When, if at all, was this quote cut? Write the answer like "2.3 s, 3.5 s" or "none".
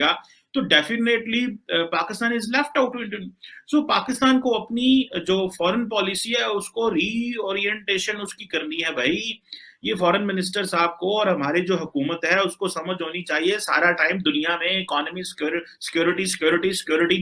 none